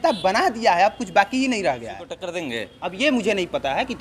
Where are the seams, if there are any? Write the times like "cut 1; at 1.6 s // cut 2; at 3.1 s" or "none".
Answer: cut 1; at 2.3 s